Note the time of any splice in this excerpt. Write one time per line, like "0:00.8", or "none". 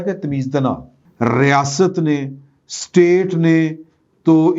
0:01.0